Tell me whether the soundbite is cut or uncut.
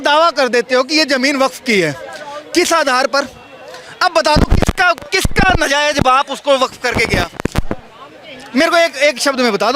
uncut